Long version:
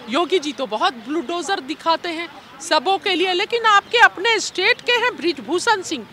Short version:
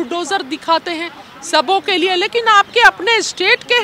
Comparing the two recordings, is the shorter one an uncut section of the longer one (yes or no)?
yes